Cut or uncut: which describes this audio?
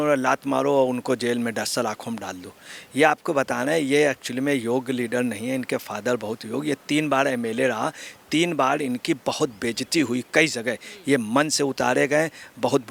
uncut